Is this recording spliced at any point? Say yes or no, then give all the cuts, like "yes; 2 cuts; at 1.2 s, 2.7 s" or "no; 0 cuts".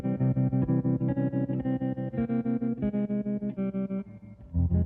no; 0 cuts